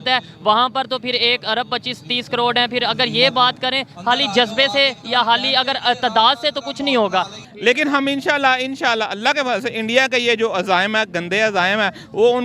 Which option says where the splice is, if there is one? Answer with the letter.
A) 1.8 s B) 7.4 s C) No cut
B